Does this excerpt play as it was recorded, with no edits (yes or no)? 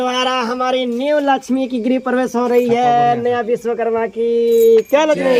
yes